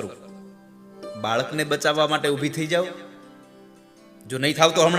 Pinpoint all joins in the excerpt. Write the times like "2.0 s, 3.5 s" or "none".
0.9 s